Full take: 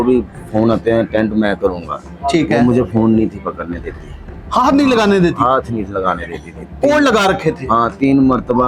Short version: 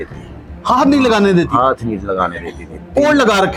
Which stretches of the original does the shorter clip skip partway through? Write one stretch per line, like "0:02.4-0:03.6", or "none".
none